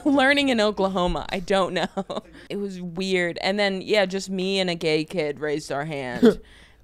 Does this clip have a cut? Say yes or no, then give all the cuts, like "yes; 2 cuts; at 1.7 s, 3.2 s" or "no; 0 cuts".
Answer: yes; 1 cut; at 2.2 s